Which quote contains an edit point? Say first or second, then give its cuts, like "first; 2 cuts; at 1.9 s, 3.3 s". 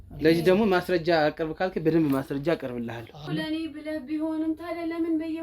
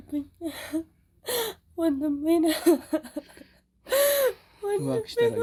first; 1 cut; at 3.1 s